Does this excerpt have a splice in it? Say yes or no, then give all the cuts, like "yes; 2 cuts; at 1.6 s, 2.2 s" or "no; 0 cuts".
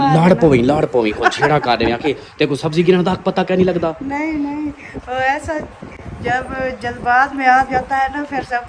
no; 0 cuts